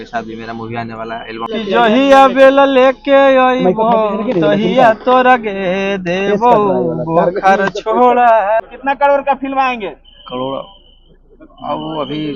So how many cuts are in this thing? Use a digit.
2